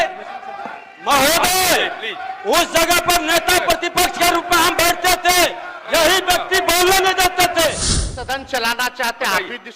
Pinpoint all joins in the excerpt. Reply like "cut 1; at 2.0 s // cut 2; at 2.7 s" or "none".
cut 1; at 8.2 s